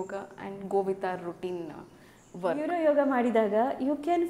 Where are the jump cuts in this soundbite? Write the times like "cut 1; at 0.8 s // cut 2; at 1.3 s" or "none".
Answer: cut 1; at 2.6 s